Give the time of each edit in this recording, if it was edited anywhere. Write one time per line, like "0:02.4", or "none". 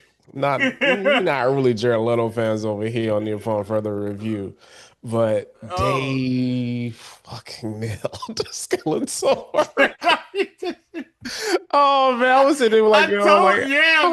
none